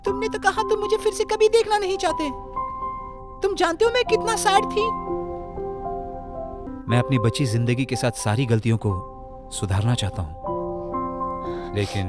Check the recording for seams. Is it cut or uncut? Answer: cut